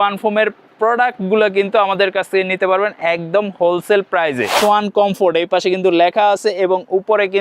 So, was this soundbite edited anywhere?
yes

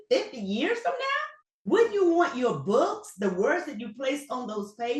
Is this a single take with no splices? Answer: no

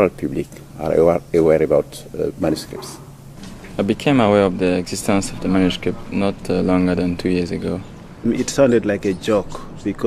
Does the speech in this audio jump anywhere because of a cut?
no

